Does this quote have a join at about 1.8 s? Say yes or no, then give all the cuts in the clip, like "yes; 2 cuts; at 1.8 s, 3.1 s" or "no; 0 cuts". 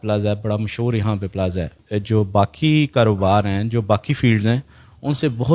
yes; 1 cut; at 1.8 s